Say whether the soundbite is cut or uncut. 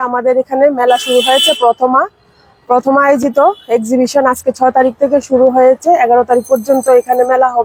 uncut